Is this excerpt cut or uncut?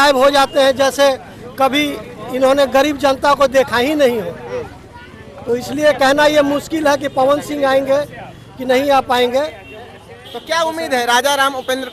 uncut